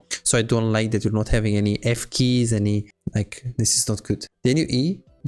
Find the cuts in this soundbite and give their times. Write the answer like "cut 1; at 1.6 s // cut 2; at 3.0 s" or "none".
cut 1; at 3.0 s // cut 2; at 4.3 s